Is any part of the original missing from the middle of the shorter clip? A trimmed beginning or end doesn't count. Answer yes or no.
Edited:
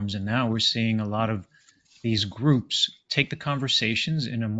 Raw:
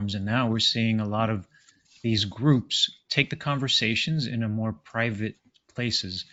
no